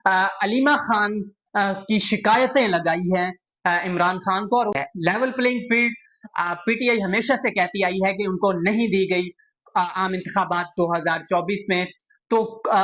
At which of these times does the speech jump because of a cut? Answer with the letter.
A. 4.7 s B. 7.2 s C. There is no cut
A